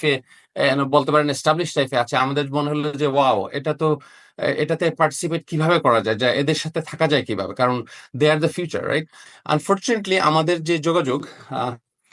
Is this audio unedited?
no; 1 cut; at 9.2 s

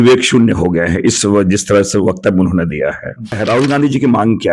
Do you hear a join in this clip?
yes; 1 cut; at 3.4 s

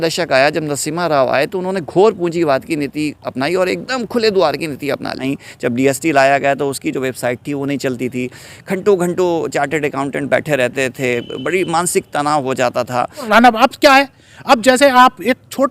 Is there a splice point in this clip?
yes; 2 cuts; at 5.2 s, 13.3 s

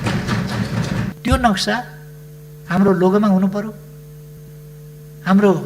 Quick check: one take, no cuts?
no; 1 cut; at 1.1 s

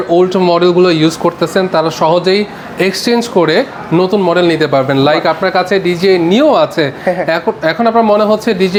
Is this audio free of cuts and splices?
yes; 0 cuts

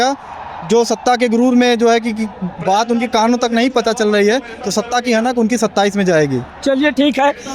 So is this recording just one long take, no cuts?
yes; 0 cuts

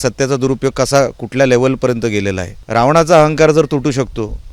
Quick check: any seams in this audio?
yes; 1 cut; at 2.5 s

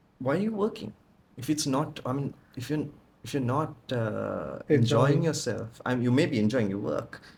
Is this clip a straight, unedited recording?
yes; 0 cuts

